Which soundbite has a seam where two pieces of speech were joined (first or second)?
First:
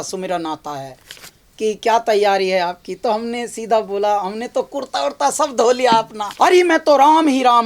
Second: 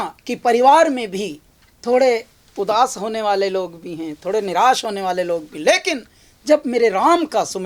first